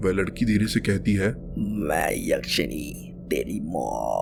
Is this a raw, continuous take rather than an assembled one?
yes; 0 cuts

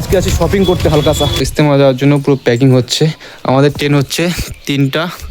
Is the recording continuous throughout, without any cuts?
no; 1 cut; at 1.4 s

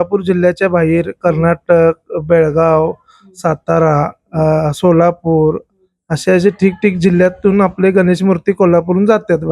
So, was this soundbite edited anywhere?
no; 0 cuts

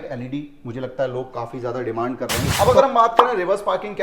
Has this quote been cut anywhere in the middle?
yes; 1 cut; at 2.4 s

